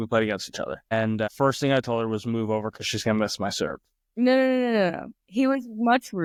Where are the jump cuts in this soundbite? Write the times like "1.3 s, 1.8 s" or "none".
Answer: none